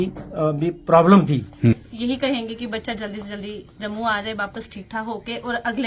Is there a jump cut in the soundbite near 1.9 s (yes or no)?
yes